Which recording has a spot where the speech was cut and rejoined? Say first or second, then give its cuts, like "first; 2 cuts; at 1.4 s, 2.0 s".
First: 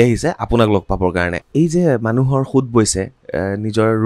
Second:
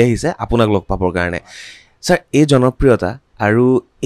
first; 1 cut; at 1.4 s